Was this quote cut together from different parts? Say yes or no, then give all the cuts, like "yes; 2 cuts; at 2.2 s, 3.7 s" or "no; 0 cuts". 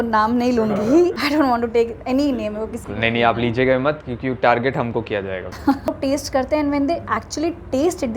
yes; 1 cut; at 5.9 s